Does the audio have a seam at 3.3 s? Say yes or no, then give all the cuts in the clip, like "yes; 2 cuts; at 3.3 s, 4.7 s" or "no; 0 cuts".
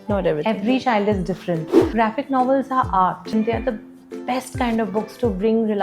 yes; 2 cuts; at 1.8 s, 3.3 s